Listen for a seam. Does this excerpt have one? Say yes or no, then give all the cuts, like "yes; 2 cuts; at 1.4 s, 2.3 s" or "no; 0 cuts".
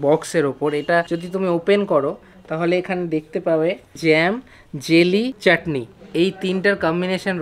yes; 3 cuts; at 1.2 s, 4.0 s, 5.4 s